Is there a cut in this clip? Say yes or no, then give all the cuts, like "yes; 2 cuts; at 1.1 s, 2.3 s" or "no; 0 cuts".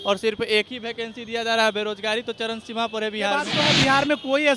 yes; 1 cut; at 3.5 s